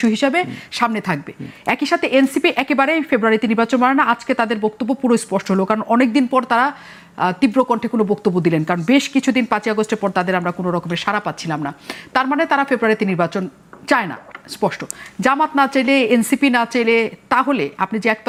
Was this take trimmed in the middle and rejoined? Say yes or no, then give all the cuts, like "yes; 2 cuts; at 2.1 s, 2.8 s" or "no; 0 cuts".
no; 0 cuts